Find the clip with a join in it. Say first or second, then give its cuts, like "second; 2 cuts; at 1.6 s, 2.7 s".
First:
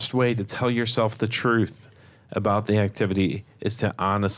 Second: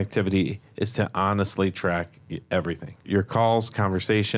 second; 1 cut; at 3.0 s